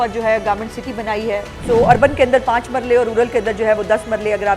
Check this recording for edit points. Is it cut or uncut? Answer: cut